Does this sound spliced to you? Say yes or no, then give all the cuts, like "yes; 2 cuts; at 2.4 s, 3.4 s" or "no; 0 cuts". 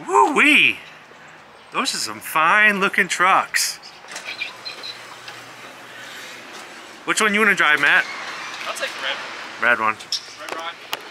no; 0 cuts